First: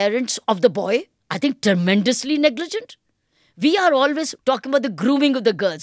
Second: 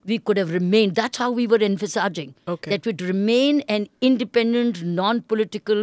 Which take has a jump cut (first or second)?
first